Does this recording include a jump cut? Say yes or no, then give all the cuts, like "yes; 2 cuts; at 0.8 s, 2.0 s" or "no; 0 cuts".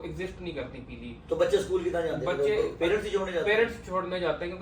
no; 0 cuts